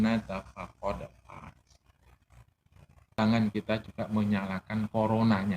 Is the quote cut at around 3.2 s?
yes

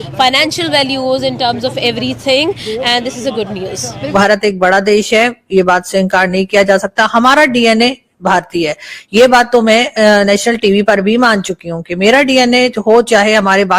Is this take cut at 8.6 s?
no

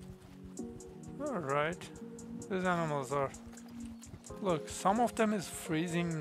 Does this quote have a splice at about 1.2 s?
yes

